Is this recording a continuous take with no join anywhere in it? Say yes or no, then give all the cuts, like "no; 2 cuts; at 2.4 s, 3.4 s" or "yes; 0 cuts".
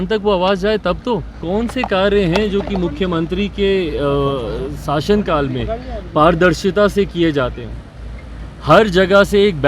no; 1 cut; at 1.3 s